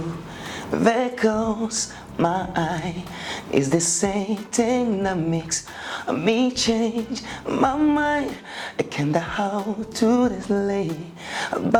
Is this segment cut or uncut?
uncut